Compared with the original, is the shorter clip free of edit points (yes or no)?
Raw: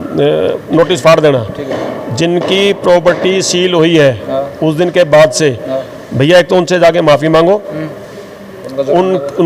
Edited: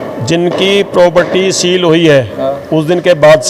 yes